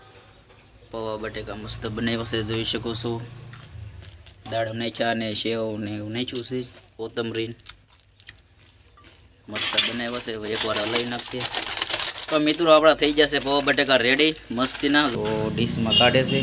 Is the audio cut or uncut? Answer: cut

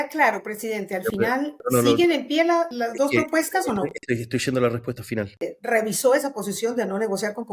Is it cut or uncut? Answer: cut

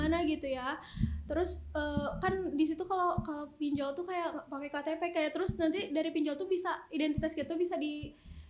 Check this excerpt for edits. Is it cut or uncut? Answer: uncut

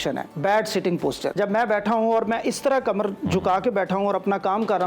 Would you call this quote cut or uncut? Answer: cut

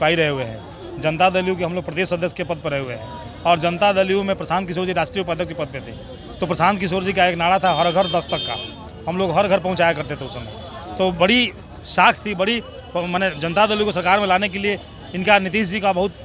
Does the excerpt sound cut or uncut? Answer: uncut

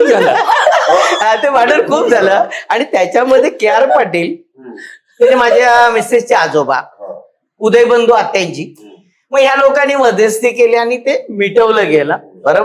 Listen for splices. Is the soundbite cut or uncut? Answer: uncut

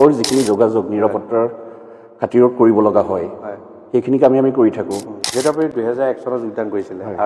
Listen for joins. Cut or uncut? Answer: cut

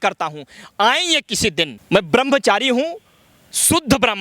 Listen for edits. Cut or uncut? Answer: cut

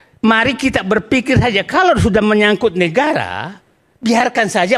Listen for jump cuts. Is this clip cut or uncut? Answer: uncut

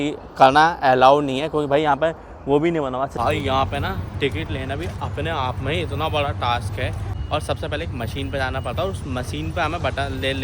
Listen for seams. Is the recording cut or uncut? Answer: cut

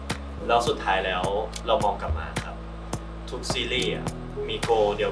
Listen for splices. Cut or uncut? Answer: uncut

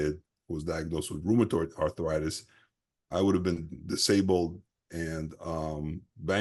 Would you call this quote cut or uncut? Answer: uncut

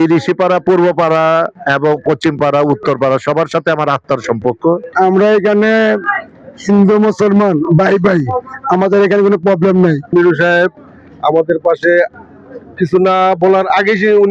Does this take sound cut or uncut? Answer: cut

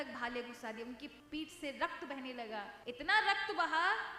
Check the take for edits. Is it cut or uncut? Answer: cut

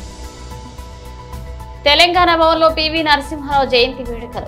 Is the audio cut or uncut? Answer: cut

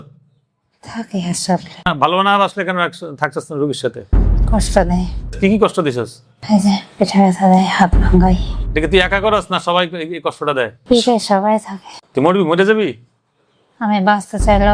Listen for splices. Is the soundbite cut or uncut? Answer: uncut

